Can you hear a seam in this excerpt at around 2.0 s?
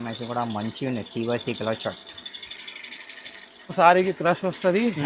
no; 1 cut; at 3.7 s

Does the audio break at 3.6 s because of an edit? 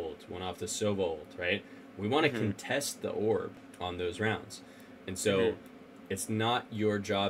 yes; 1 cut; at 3.6 s

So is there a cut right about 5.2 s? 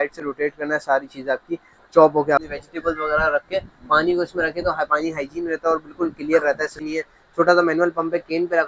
no; 2 cuts; at 2.4 s, 6.8 s

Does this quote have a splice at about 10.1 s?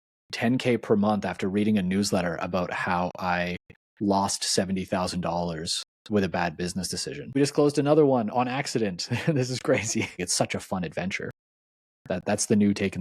yes; 2 cuts; at 7.4 s, 10.1 s

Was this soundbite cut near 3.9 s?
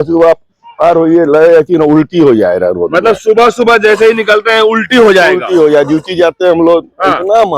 no; 0 cuts

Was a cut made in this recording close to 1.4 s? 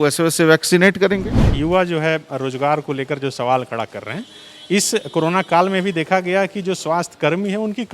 yes; 1 cut; at 1.4 s

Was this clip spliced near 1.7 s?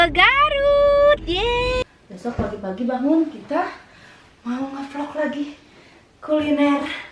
yes; 1 cut; at 1.7 s

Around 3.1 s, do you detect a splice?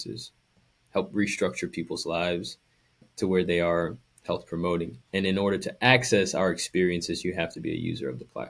yes; 2 cuts; at 3.1 s, 5.0 s

